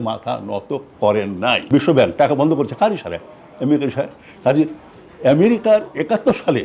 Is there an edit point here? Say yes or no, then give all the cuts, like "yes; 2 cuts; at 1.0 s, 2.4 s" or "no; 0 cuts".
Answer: yes; 1 cut; at 1.6 s